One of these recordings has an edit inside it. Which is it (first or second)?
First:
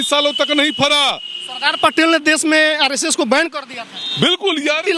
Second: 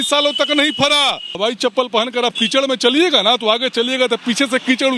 second